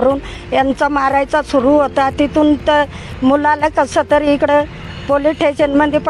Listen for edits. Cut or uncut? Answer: uncut